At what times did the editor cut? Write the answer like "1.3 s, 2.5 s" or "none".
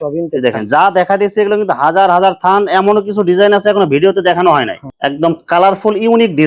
4.8 s